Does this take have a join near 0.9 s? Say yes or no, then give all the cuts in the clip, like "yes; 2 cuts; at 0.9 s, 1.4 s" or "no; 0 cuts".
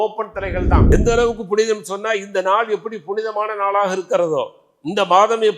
yes; 1 cut; at 0.9 s